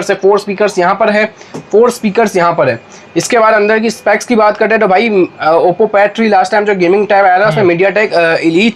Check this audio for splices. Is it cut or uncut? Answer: uncut